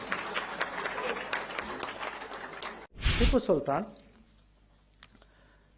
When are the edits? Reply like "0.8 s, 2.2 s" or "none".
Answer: 3.0 s